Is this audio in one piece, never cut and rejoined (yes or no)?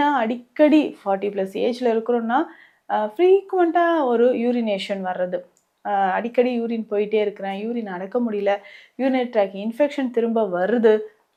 yes